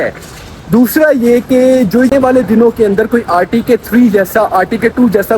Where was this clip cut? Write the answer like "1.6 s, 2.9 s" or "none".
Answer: 2.1 s